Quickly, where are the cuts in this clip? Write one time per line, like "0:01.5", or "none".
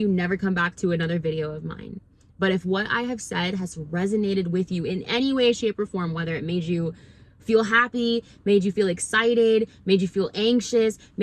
none

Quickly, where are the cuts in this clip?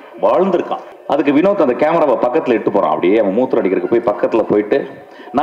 0:00.9

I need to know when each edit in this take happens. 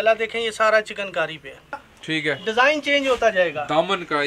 0:01.9

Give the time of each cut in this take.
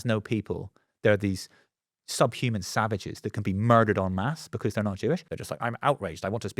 0:05.3

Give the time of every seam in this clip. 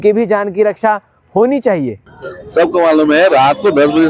0:02.1

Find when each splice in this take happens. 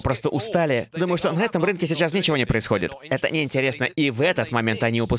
none

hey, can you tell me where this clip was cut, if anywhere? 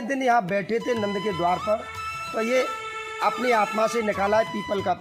none

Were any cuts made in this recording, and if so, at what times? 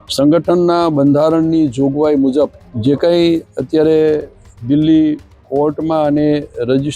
0:02.7

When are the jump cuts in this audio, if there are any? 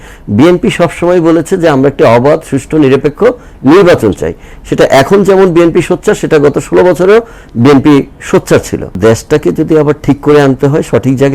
0:08.9

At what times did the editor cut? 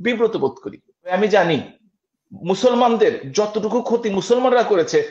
0:01.1

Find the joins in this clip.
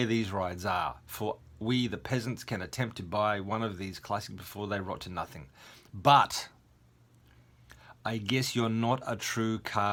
none

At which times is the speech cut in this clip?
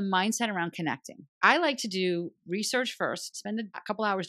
0:01.3

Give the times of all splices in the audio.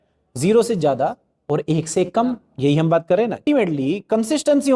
0:03.4

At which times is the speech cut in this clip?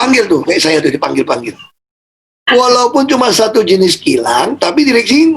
0:02.5

